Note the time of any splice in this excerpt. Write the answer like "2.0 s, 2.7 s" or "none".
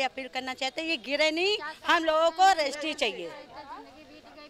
none